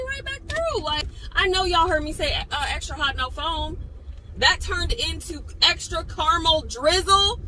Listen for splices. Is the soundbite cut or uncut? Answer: cut